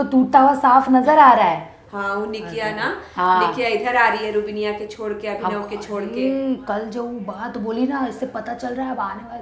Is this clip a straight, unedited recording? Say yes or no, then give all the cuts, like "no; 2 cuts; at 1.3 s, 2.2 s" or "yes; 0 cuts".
yes; 0 cuts